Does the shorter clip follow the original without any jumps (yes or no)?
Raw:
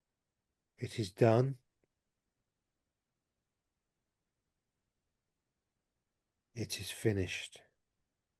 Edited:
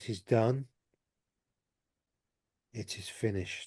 no